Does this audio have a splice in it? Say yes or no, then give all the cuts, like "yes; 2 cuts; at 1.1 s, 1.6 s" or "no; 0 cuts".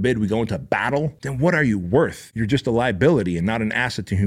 yes; 2 cuts; at 1.2 s, 2.3 s